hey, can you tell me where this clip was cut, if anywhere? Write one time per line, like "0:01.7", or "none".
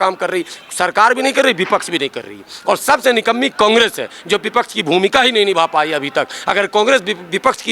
none

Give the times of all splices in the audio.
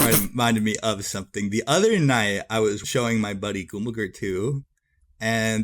0:02.8

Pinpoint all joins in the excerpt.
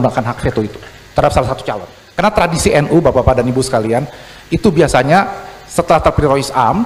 0:02.0

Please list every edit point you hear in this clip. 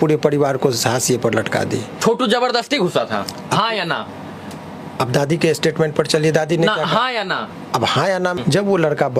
0:02.0
0:08.4

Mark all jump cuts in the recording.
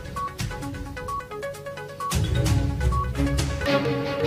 none

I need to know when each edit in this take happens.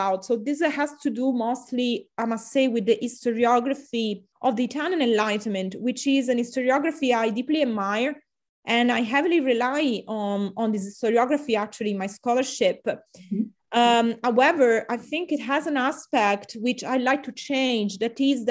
0:04.2

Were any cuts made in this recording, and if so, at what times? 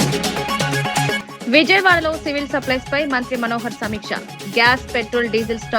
0:01.2

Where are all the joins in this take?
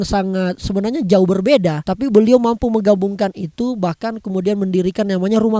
0:01.8

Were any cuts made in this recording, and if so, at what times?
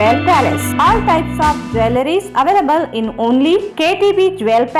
none

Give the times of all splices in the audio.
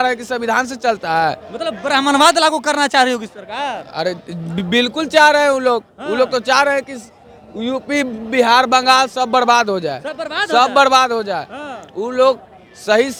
none

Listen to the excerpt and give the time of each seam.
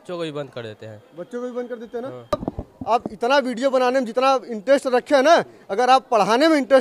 0:02.3

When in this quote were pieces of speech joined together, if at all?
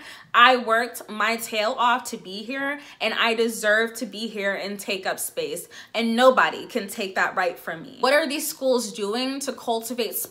0:08.0

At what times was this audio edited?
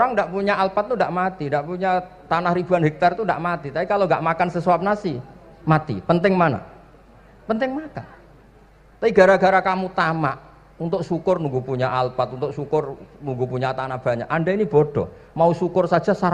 none

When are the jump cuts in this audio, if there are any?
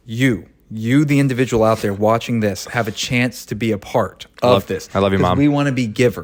none

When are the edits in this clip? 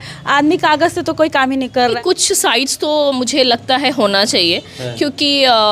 0:02.0

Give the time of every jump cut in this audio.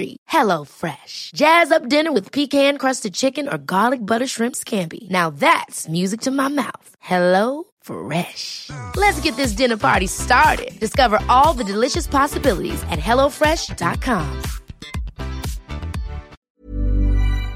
0:16.4

